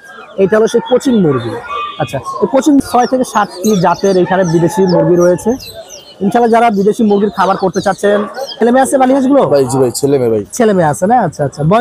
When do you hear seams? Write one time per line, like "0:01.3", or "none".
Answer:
0:02.8
0:08.6